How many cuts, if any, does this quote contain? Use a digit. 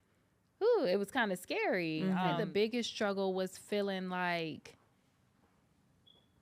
1